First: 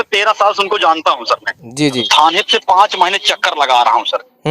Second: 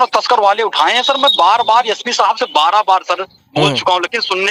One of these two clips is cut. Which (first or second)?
first